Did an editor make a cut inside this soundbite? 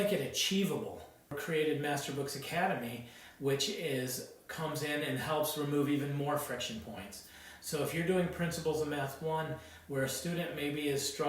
yes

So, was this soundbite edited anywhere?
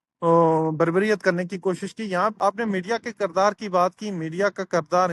yes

